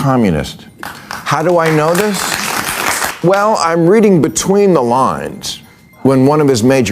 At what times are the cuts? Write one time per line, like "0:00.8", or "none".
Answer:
0:03.1

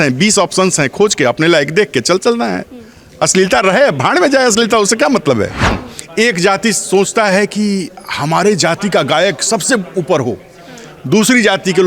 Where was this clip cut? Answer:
0:05.8

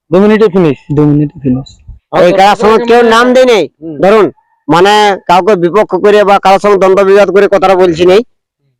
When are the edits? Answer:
0:02.0

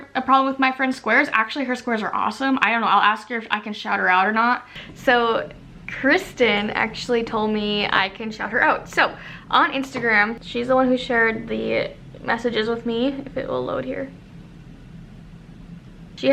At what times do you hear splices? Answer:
none

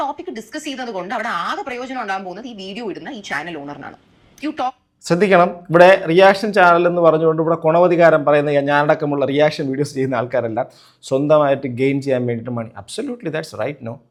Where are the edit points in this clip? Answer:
none

